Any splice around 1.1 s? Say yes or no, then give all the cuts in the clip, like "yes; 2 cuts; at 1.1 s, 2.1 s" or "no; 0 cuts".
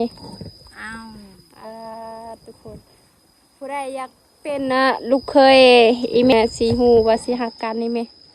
no; 1 cut; at 6.3 s